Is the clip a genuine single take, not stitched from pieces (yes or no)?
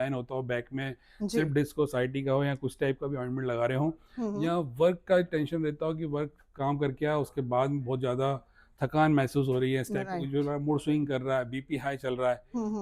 yes